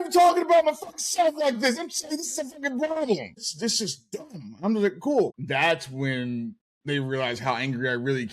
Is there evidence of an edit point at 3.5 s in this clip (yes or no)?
yes